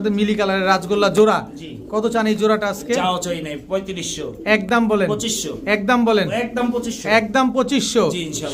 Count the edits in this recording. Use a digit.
0